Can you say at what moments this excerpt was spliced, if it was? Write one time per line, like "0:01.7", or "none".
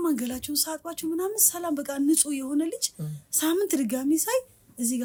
none